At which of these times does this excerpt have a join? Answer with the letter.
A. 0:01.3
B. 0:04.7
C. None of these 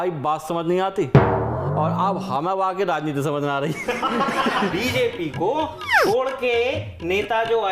B